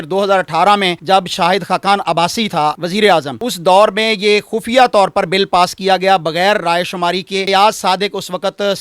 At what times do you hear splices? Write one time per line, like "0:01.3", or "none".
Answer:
0:01.0
0:02.8